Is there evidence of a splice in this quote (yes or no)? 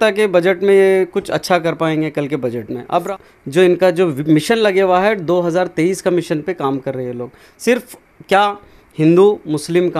yes